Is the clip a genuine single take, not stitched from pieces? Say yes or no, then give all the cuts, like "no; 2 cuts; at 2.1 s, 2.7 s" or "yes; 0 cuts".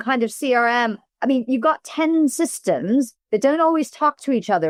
yes; 0 cuts